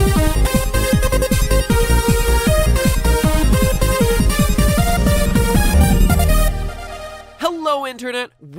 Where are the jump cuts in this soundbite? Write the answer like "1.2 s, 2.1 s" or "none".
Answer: 3.2 s